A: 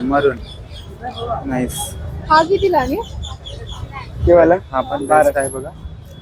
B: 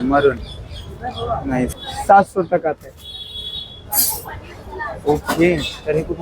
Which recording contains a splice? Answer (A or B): B